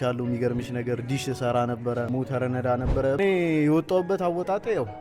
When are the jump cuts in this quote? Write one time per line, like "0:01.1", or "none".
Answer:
0:02.1
0:03.2